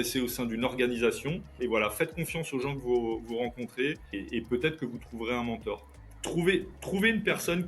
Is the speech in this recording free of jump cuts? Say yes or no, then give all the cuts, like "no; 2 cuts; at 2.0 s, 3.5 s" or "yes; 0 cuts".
no; 3 cuts; at 1.6 s, 4.1 s, 5.9 s